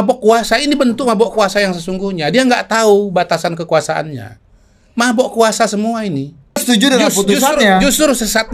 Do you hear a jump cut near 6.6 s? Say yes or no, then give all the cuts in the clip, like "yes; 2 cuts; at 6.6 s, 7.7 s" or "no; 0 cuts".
yes; 1 cut; at 6.6 s